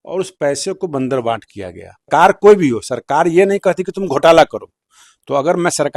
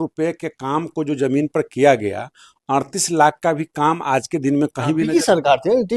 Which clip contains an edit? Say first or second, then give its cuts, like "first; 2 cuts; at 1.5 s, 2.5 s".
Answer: first; 1 cut; at 2.1 s